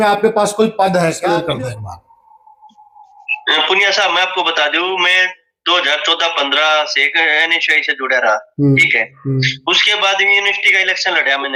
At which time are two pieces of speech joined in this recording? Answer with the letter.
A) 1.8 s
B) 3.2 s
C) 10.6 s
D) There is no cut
D